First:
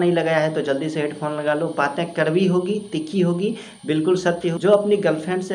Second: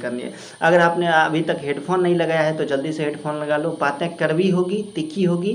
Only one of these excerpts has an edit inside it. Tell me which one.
first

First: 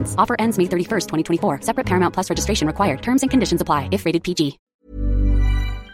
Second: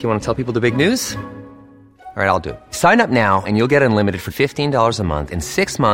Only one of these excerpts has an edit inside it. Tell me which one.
first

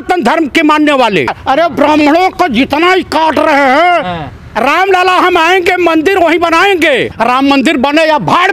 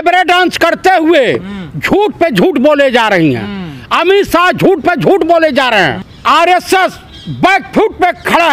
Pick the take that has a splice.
first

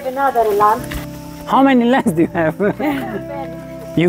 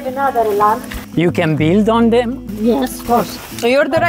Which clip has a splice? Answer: second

